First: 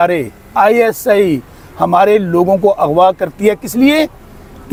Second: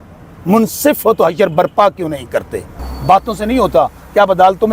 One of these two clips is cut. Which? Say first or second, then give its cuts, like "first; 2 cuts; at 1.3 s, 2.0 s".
second; 1 cut; at 2.9 s